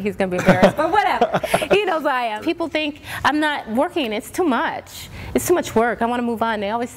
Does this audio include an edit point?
yes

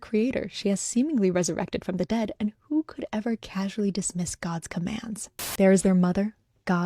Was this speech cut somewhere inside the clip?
yes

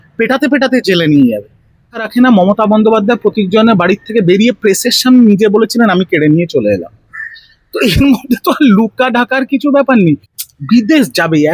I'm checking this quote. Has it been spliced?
yes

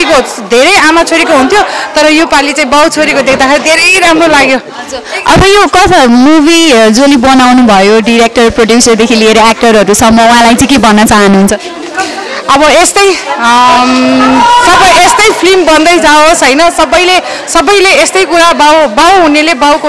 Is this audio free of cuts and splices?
yes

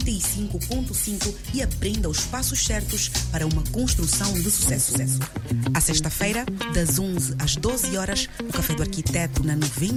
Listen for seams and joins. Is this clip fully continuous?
yes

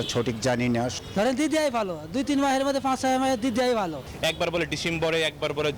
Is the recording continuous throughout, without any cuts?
no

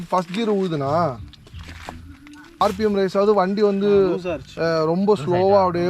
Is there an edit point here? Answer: yes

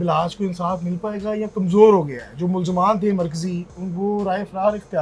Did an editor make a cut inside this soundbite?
no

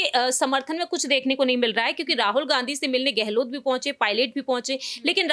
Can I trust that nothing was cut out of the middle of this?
yes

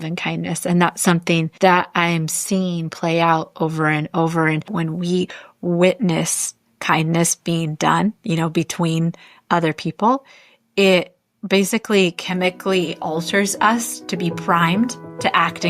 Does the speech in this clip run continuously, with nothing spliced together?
no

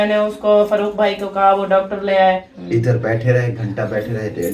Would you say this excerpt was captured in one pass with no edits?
no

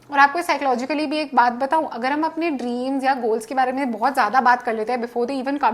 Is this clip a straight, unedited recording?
yes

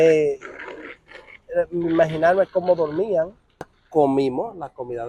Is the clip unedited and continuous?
no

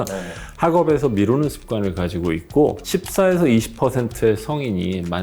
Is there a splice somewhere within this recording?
yes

